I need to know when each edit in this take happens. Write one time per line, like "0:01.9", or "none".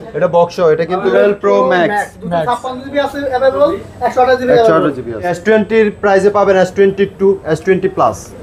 0:01.0
0:05.3